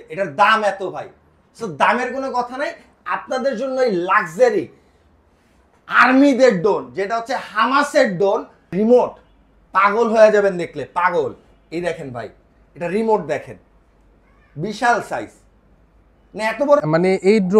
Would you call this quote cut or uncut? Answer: cut